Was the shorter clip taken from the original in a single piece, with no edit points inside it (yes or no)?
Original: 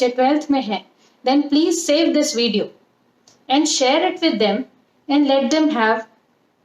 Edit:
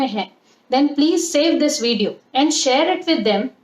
no